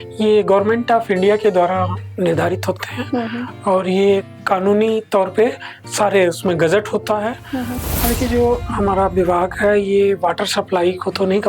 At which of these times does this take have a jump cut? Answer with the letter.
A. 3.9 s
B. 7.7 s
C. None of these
B